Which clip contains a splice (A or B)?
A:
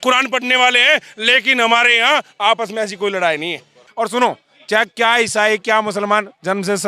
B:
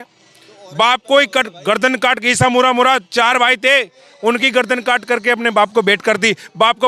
A